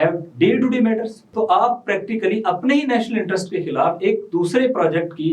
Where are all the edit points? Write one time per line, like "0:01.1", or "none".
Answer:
0:01.2